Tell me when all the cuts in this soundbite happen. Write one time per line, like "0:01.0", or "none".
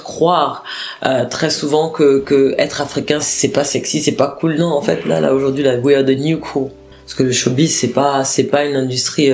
0:03.2
0:06.8